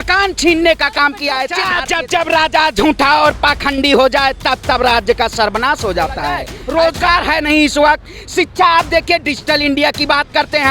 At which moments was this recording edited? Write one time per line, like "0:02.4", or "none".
0:01.6
0:06.5